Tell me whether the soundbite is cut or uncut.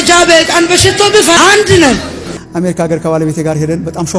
cut